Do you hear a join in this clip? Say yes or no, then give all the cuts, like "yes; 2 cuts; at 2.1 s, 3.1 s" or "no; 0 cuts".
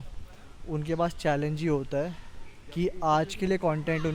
no; 0 cuts